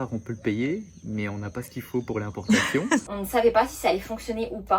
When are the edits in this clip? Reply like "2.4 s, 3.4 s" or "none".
3.1 s